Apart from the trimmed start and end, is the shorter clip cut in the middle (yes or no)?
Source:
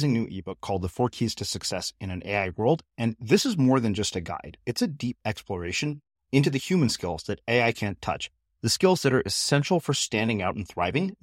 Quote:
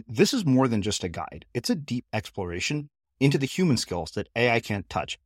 no